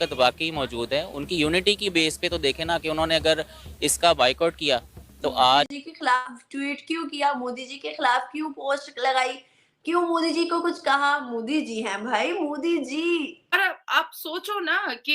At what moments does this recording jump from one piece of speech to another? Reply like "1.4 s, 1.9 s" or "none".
5.7 s, 13.5 s